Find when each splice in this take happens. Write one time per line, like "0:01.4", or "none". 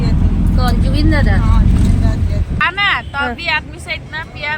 0:02.6